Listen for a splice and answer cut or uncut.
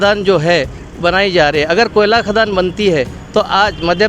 uncut